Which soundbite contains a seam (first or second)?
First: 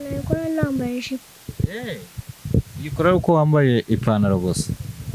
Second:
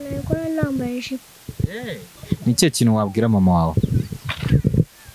second